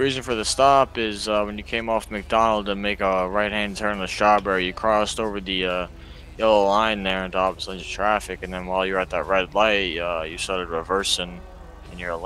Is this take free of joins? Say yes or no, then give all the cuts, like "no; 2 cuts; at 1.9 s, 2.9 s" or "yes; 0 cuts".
yes; 0 cuts